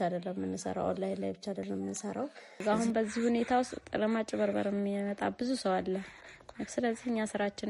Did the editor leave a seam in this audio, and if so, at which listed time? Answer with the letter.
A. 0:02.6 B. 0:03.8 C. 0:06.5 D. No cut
A